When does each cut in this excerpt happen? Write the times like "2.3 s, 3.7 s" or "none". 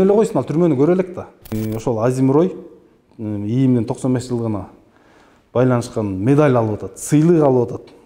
1.5 s